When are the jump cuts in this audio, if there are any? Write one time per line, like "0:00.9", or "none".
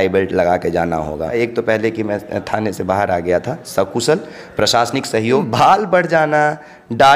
0:01.3
0:05.5